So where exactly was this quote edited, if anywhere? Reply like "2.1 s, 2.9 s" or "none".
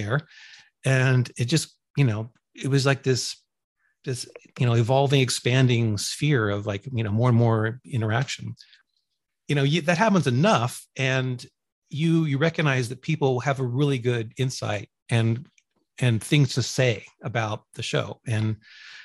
8.8 s